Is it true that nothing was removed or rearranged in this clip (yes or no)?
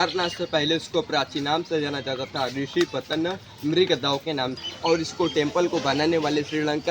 no